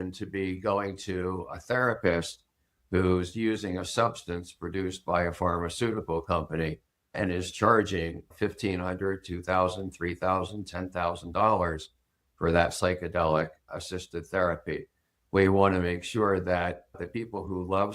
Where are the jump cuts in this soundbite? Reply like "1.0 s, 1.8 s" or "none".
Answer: 7.1 s, 8.3 s, 13.7 s, 17.0 s